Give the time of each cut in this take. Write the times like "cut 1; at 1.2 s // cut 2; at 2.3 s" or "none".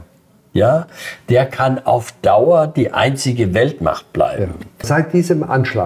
cut 1; at 4.9 s